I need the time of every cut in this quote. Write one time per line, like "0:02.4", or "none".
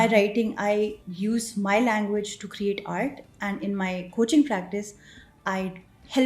0:01.0